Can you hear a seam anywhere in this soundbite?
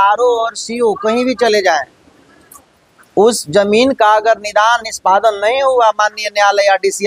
no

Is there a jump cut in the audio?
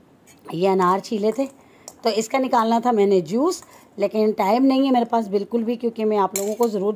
no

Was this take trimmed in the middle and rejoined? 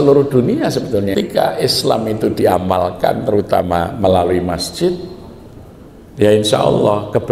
yes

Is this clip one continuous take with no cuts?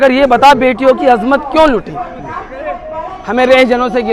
yes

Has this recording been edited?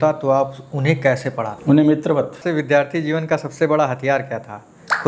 yes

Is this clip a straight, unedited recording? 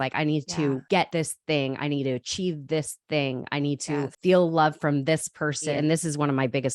no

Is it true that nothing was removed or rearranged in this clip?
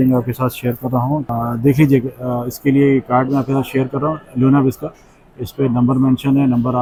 yes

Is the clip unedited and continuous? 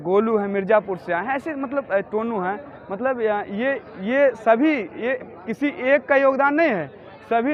yes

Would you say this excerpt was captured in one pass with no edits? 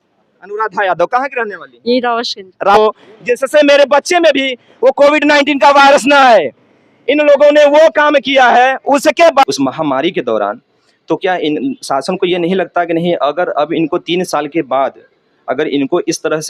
no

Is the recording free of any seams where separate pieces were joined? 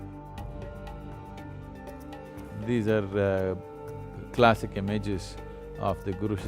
yes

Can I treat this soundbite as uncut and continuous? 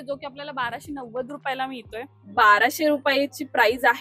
no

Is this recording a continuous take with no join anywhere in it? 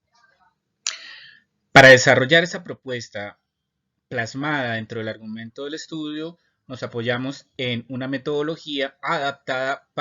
no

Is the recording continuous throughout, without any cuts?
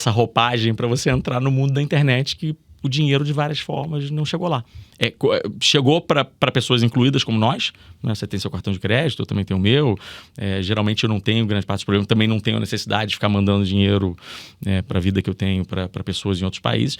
yes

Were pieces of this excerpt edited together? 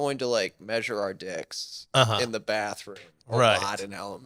no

